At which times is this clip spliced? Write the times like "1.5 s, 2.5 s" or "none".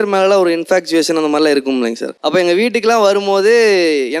2.1 s